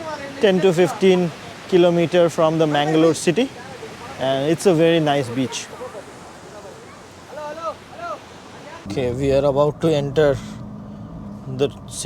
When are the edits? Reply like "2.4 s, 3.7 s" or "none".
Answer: 8.8 s